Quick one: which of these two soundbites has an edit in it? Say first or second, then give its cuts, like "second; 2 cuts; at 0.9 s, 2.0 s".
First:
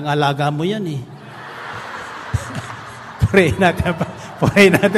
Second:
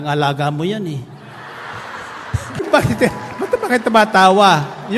second; 1 cut; at 2.6 s